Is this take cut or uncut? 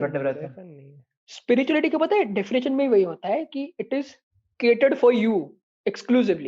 uncut